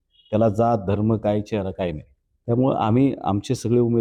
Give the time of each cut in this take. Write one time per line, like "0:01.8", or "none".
none